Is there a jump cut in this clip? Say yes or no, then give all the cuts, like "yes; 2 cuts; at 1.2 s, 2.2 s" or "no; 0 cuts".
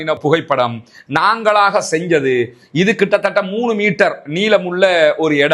no; 0 cuts